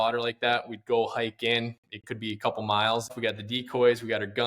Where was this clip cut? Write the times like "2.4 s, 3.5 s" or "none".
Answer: 3.2 s

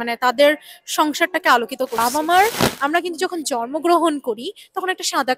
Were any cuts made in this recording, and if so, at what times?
2.0 s

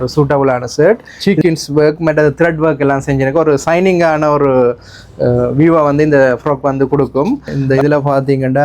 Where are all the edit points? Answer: 1.1 s, 7.5 s

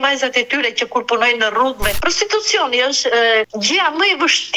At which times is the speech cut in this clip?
1.9 s, 3.5 s

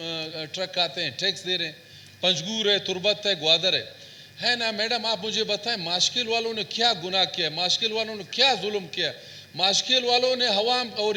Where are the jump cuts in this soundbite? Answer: none

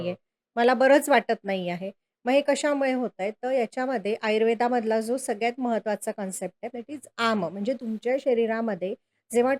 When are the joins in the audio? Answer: none

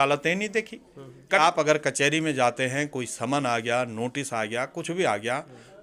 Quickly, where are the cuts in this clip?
1.4 s

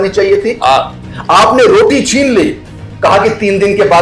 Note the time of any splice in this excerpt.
none

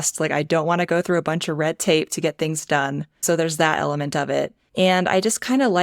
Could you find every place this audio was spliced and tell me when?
3.1 s, 4.6 s

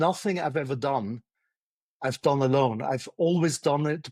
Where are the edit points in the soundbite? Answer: none

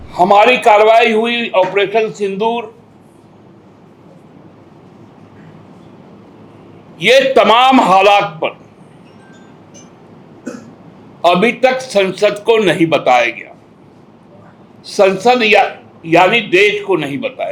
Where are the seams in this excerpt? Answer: none

